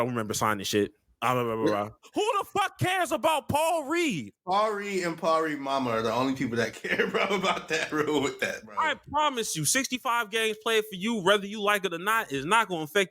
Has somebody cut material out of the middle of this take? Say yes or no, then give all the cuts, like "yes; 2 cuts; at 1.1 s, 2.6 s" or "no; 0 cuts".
yes; 3 cuts; at 1.1 s, 2.0 s, 4.3 s